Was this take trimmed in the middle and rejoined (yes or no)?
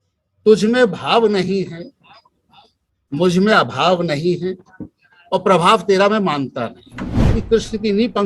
yes